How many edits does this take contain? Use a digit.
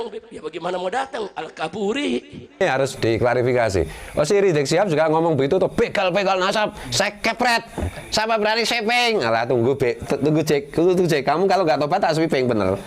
1